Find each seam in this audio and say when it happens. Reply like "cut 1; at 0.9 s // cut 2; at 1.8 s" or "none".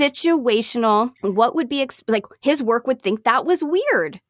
cut 1; at 1.1 s